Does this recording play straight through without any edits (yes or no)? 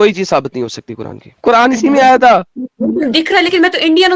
no